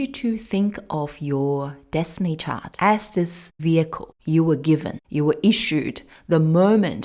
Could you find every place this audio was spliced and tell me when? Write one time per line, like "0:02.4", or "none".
0:02.6
0:03.5
0:04.1
0:05.0